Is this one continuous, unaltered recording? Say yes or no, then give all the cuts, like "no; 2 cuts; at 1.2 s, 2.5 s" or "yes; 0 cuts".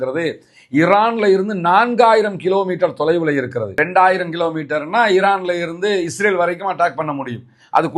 no; 1 cut; at 3.7 s